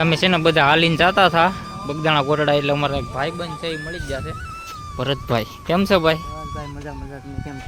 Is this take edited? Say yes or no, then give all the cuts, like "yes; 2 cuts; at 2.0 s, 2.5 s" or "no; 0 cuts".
no; 0 cuts